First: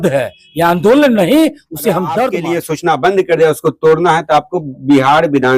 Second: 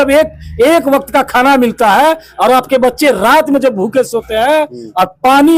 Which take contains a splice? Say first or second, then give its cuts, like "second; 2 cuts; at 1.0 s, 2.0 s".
first; 1 cut; at 2.4 s